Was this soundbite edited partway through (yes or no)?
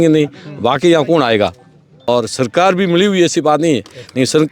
yes